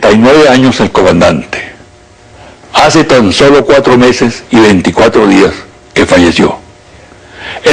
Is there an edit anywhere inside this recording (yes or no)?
no